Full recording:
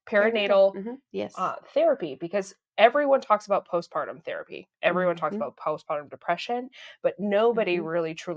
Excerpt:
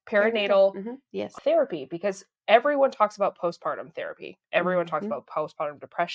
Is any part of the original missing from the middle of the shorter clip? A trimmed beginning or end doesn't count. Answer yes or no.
yes